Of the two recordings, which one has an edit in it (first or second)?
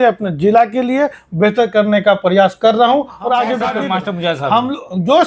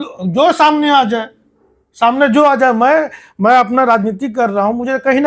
first